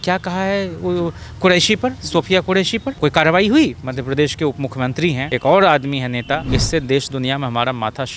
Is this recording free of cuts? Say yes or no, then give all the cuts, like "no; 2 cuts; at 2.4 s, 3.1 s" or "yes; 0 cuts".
no; 3 cuts; at 2.9 s, 5.2 s, 6.4 s